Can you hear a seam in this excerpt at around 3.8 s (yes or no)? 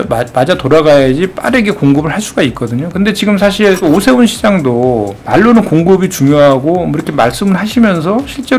yes